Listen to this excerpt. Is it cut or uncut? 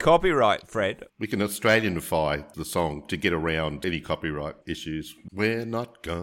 cut